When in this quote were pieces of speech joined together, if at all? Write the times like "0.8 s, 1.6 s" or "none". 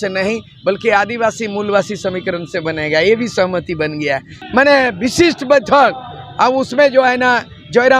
4.4 s